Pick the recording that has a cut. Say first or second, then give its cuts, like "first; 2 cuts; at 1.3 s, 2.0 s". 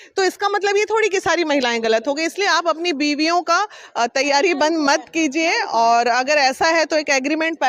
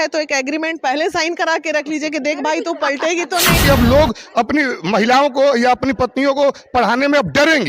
second; 1 cut; at 3.6 s